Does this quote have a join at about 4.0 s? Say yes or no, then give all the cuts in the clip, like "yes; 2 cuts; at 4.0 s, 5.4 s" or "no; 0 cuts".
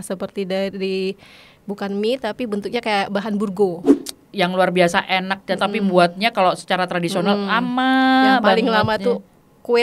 yes; 1 cut; at 4.0 s